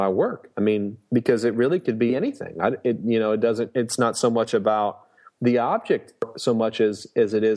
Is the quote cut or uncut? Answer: cut